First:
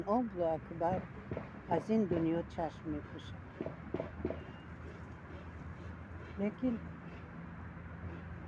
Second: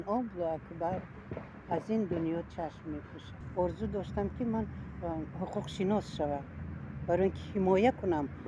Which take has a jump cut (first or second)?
second